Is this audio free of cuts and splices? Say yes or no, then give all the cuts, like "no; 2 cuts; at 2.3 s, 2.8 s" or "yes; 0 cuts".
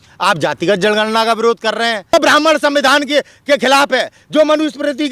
no; 1 cut; at 2.1 s